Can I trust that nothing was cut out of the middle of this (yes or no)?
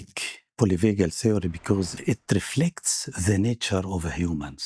no